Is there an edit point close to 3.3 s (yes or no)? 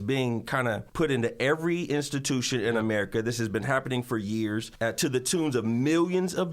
no